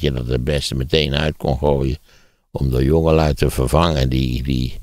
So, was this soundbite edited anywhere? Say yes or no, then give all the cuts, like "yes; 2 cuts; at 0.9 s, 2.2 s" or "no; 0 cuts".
no; 0 cuts